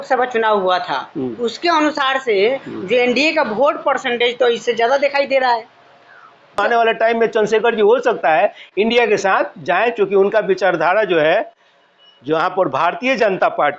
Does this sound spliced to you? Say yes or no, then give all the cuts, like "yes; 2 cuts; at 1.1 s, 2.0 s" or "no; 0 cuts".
yes; 1 cut; at 6.6 s